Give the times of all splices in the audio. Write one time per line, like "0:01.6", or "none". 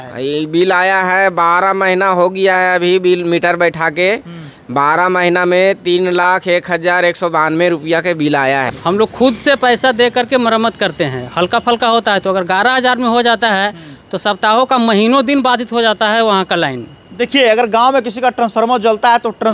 0:08.7